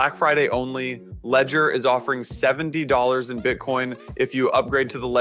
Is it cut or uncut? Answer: uncut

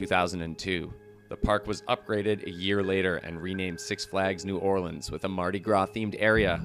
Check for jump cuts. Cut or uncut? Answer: cut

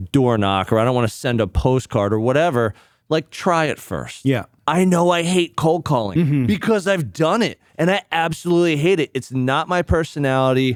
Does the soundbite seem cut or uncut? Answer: uncut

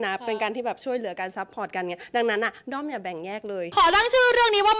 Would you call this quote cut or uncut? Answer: cut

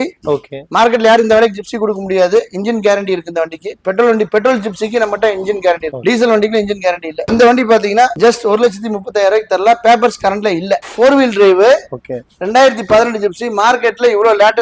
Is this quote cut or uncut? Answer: uncut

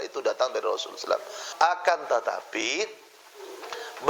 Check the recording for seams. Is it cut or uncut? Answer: cut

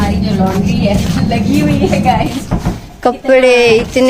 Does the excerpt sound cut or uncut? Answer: uncut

